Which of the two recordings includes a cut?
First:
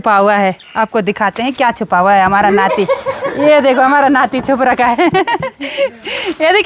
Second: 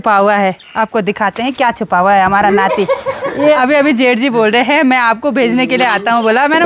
second; 1 cut; at 3.6 s

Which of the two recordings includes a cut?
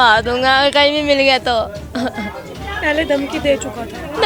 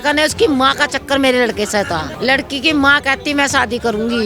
second; 1 cut; at 2.1 s

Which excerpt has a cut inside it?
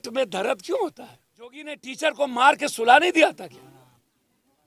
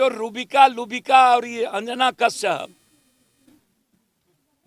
first; 1 cut; at 1.8 s

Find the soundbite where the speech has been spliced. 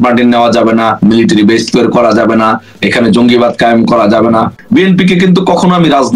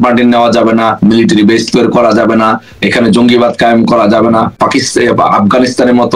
first; 1 cut; at 4.5 s

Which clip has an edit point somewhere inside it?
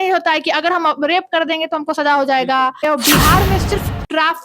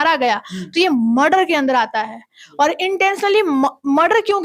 first; 1 cut; at 2.8 s

